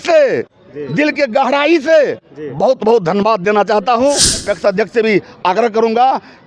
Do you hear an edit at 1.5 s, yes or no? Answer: no